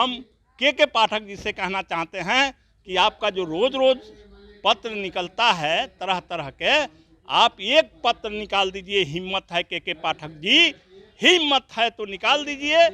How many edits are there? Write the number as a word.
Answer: zero